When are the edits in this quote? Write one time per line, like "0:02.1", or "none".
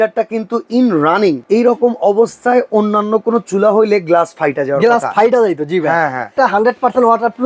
0:01.4
0:06.3